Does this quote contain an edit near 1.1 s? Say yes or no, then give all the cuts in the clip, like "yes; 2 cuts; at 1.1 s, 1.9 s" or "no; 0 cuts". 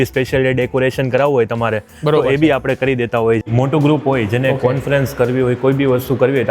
no; 1 cut; at 3.4 s